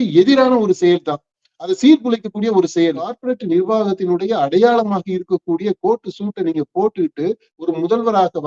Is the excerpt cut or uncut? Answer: cut